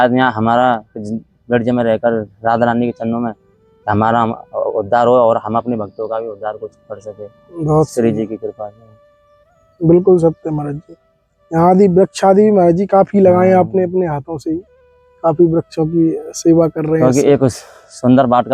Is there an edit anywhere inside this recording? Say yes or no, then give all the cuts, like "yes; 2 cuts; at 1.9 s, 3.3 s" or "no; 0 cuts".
no; 0 cuts